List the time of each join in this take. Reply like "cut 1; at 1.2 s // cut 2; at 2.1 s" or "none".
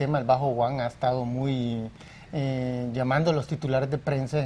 cut 1; at 0.9 s